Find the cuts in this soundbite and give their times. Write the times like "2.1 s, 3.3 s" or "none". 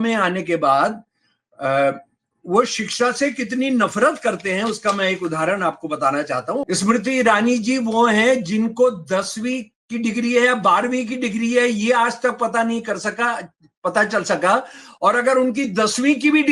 6.6 s

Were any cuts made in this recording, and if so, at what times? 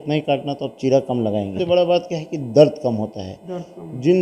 1.5 s

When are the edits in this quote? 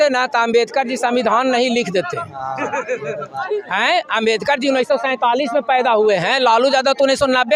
none

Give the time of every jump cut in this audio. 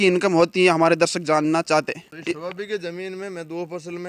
2.1 s

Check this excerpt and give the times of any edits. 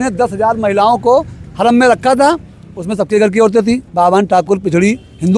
none

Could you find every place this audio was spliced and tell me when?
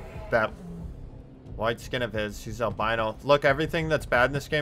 none

